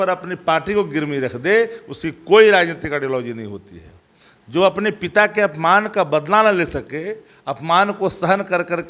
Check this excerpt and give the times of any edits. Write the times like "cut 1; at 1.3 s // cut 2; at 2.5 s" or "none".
none